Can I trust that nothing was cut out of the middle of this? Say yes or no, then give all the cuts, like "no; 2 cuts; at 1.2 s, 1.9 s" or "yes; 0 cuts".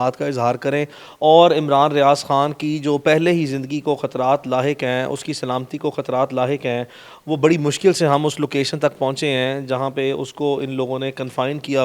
yes; 0 cuts